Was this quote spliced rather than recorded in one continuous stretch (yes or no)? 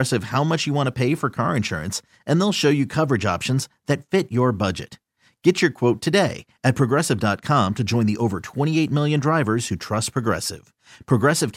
no